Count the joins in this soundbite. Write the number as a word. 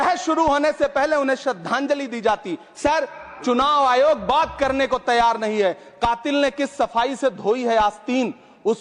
zero